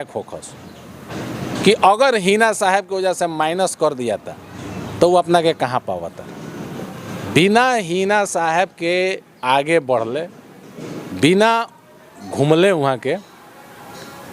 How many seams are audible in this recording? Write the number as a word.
one